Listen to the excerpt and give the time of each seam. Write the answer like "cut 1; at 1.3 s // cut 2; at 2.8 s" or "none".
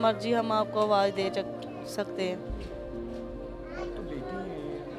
none